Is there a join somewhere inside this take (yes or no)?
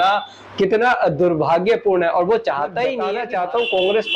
yes